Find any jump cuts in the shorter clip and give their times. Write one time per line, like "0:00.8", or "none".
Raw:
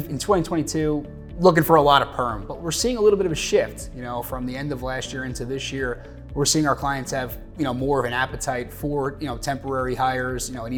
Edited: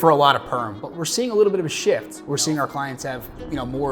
0:02.1